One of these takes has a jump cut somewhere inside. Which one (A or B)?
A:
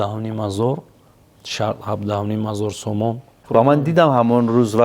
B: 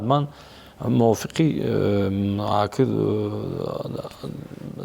A